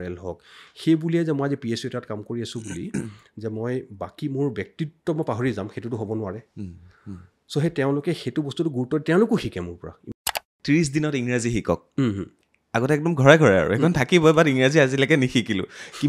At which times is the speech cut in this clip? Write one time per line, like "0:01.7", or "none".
0:10.2